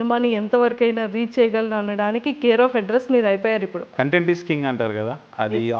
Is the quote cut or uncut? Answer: cut